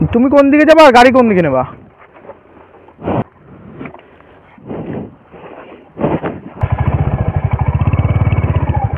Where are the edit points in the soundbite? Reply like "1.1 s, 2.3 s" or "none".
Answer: 3.2 s